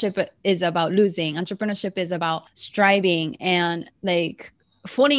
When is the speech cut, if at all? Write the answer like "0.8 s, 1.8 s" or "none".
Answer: 2.6 s